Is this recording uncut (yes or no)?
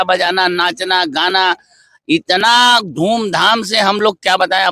yes